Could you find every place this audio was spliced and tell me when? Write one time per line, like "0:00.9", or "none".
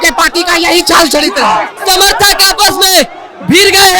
0:01.7